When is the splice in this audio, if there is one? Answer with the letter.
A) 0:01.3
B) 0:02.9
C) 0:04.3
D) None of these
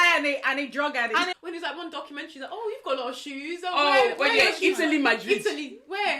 A